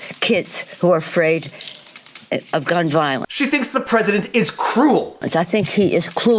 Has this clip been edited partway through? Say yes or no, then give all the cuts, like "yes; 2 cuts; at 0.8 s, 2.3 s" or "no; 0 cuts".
no; 0 cuts